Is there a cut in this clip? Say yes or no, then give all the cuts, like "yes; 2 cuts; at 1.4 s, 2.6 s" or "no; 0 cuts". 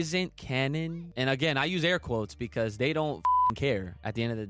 yes; 1 cut; at 1.0 s